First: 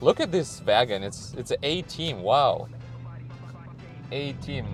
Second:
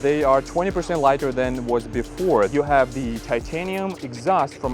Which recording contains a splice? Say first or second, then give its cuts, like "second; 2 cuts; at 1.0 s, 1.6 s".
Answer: second; 1 cut; at 2.5 s